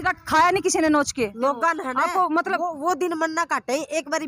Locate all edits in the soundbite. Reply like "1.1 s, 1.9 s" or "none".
1.3 s